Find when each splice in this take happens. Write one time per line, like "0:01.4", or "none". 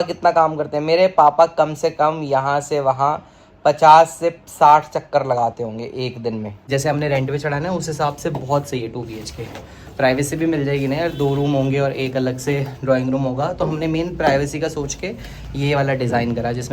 0:06.6